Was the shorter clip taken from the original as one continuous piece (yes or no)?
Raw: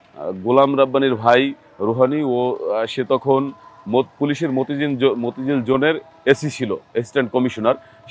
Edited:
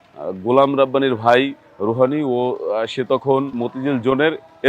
no